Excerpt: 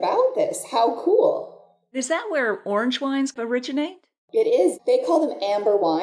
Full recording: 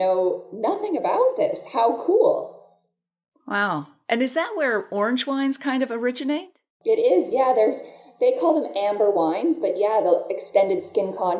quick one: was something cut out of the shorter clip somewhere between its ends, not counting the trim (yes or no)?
yes